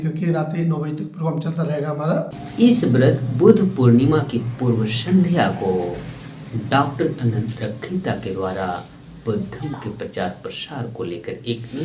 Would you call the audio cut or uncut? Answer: cut